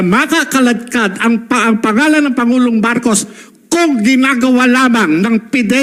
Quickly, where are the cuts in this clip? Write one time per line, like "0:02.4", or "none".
none

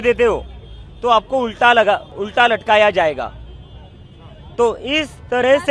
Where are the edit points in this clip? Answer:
none

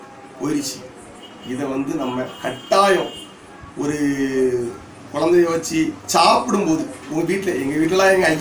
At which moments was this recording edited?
none

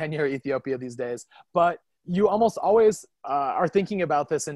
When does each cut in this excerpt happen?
0:01.9
0:03.1

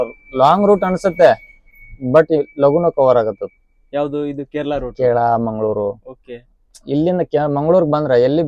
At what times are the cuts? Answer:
none

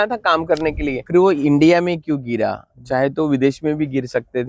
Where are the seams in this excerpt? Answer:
0:01.0

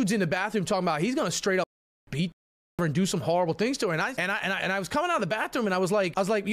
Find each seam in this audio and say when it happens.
none

